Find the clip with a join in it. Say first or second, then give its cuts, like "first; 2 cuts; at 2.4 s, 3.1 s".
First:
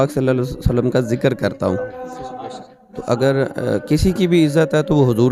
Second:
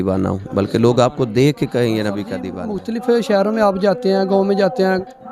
second; 1 cut; at 2.4 s